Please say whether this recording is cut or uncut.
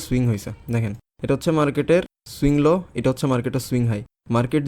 uncut